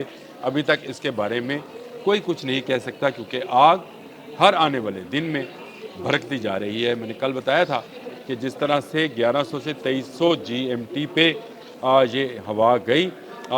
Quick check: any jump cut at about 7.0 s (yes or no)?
no